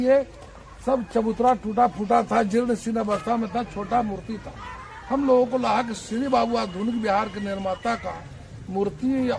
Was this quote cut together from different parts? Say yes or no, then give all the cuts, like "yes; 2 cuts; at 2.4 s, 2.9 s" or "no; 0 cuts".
no; 0 cuts